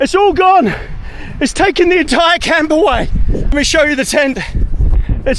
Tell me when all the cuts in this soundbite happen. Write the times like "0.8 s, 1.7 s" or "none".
3.5 s